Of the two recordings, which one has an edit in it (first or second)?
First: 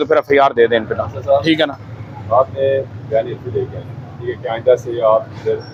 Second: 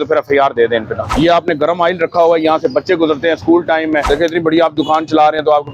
second